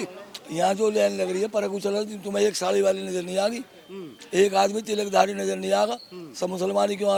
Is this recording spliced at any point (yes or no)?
no